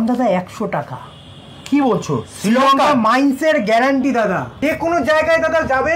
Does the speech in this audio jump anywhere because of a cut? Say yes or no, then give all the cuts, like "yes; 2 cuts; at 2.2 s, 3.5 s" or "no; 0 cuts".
yes; 1 cut; at 4.6 s